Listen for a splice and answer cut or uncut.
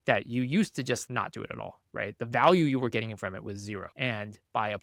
uncut